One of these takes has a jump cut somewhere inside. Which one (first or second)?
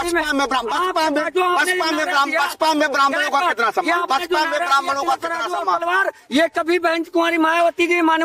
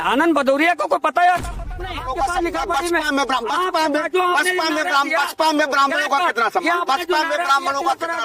second